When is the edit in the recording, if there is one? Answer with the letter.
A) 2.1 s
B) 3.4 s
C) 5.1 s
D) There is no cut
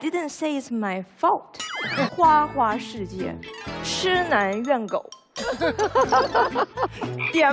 A